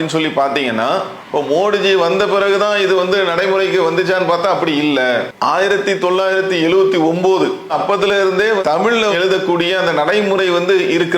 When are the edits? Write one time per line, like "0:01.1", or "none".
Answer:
0:05.3